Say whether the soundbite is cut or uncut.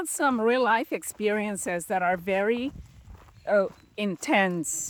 uncut